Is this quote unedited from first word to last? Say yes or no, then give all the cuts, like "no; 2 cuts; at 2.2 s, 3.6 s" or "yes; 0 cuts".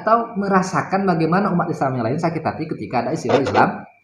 yes; 0 cuts